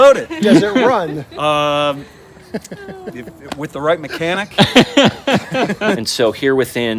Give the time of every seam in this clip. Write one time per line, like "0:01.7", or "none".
0:06.0